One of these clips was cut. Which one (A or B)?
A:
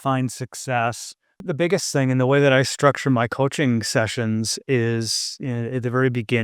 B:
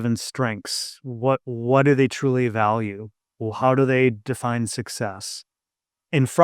A